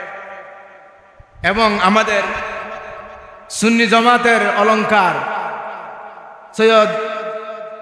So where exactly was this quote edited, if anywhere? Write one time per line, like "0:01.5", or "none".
none